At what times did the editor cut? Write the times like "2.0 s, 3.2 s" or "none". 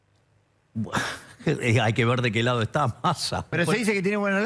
3.6 s